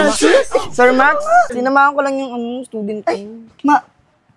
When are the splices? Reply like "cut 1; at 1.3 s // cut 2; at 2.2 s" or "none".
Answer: cut 1; at 1.5 s

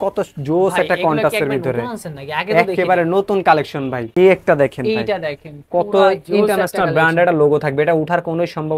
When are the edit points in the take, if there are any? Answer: cut 1; at 4.1 s

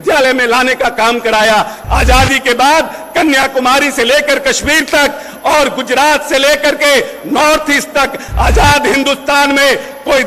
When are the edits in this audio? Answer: cut 1; at 1.8 s

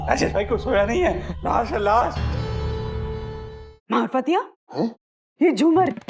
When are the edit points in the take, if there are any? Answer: cut 1; at 3.5 s

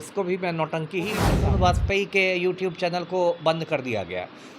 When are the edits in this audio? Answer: cut 1; at 1.3 s

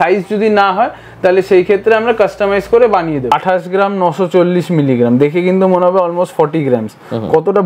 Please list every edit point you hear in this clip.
cut 1; at 3.4 s

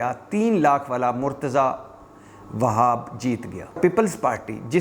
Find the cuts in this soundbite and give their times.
cut 1; at 3.8 s

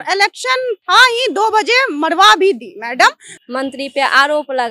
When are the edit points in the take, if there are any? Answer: cut 1; at 3.3 s

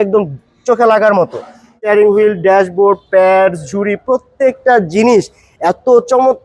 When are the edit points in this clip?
cut 1; at 1.8 s

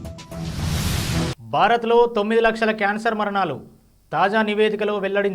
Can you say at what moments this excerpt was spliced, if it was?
cut 1; at 1.3 s

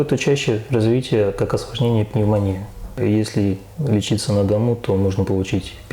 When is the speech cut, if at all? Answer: cut 1; at 3.0 s

